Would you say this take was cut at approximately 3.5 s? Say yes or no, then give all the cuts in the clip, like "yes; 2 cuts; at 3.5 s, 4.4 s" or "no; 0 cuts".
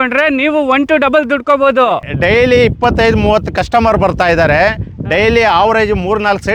no; 0 cuts